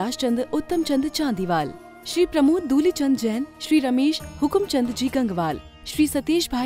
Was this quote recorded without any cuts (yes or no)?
yes